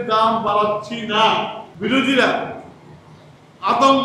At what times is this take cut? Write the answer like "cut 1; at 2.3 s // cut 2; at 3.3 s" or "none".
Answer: cut 1; at 1.6 s